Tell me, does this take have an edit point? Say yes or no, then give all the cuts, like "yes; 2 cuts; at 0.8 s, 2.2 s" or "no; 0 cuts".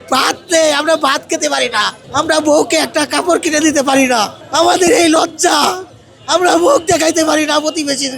yes; 2 cuts; at 2.0 s, 4.4 s